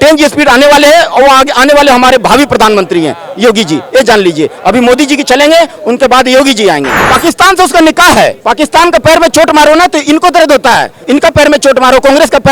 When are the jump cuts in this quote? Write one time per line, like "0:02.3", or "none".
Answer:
0:07.0